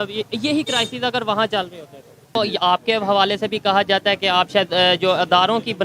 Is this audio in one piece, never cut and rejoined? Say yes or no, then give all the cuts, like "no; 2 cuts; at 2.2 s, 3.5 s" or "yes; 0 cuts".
no; 1 cut; at 2.4 s